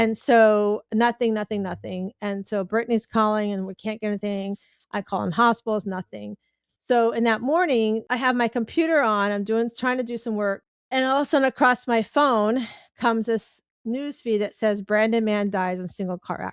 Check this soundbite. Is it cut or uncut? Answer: cut